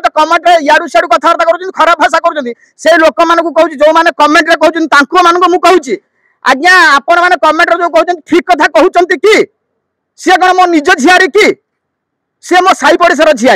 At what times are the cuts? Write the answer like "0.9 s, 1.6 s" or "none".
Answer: none